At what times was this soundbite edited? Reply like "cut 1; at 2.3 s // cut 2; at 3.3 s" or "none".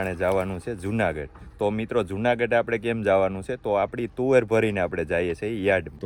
none